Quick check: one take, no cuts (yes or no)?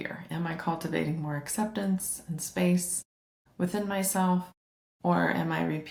yes